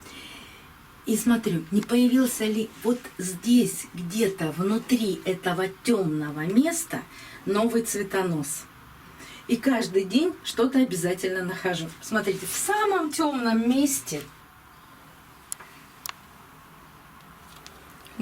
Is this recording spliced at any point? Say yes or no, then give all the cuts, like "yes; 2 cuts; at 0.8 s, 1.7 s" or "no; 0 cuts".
yes; 1 cut; at 14.4 s